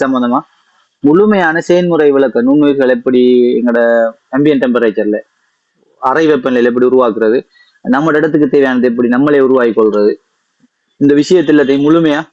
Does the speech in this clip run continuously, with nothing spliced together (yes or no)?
yes